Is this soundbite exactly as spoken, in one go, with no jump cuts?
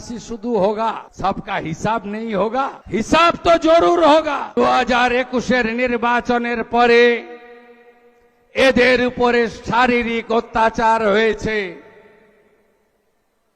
no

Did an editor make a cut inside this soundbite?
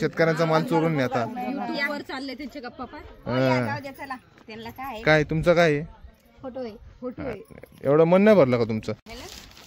no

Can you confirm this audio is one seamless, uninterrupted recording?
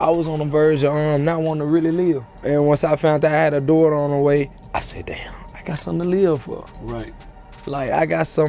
no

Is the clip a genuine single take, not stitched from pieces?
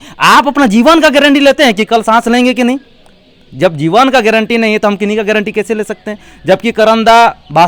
yes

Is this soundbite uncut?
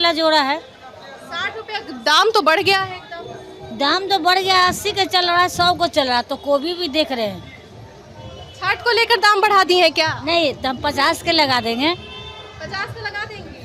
yes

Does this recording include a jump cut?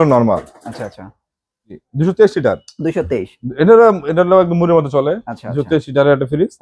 yes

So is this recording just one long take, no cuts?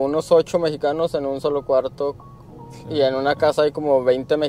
yes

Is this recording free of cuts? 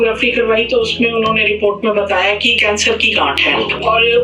no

